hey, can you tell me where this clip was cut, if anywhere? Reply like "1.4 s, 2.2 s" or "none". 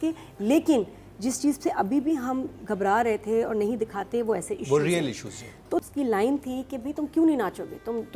5.9 s